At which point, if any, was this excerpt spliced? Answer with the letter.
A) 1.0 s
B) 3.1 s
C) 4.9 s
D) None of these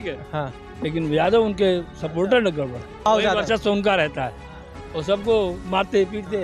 B